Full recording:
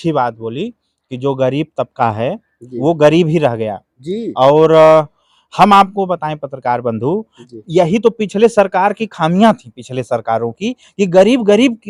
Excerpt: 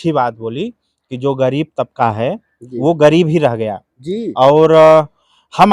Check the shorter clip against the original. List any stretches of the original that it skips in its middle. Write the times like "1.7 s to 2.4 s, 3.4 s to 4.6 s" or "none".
none